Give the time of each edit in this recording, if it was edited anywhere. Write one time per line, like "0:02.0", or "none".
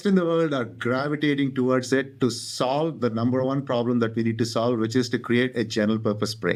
none